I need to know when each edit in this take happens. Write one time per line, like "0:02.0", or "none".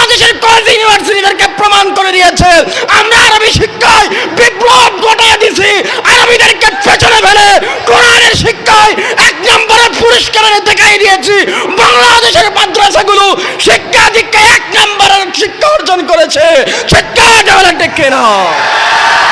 none